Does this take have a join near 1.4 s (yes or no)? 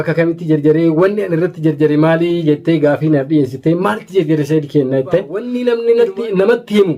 no